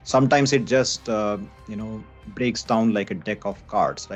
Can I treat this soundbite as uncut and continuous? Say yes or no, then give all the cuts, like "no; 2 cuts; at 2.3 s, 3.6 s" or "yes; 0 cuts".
yes; 0 cuts